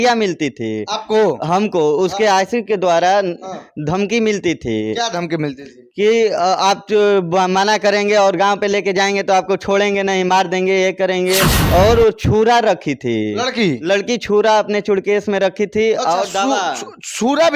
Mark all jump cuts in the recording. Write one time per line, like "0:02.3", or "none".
none